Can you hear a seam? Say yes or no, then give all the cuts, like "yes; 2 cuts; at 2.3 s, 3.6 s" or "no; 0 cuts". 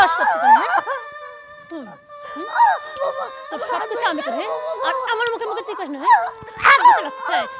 yes; 1 cut; at 2.9 s